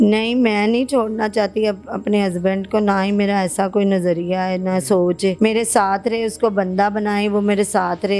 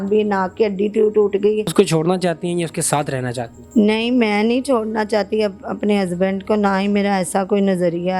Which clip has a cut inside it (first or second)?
second